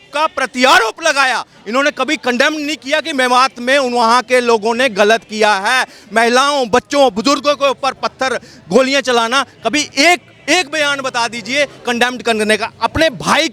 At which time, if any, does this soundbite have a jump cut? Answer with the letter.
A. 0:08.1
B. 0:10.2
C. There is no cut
C